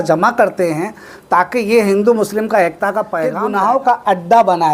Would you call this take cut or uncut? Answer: cut